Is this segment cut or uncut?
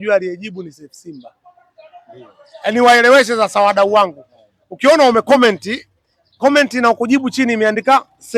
uncut